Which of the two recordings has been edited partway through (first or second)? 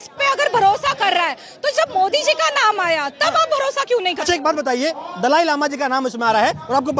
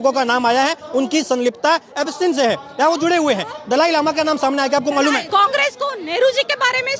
second